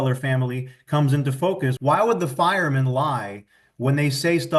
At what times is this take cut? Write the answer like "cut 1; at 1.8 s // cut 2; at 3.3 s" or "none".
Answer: cut 1; at 1.8 s